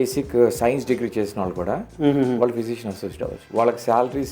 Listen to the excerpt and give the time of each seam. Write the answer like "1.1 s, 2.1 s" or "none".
1.9 s, 3.4 s